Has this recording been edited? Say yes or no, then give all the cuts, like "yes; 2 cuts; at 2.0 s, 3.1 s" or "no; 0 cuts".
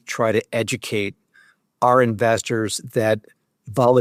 no; 0 cuts